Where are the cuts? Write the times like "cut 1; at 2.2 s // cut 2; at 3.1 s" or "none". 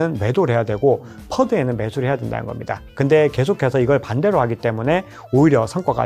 none